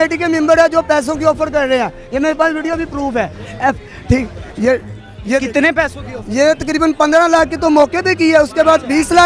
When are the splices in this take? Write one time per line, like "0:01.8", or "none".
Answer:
none